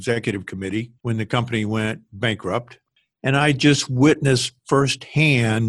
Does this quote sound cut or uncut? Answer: cut